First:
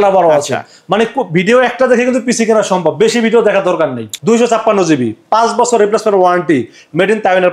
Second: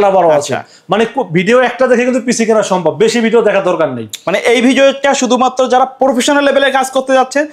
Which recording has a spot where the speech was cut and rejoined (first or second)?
first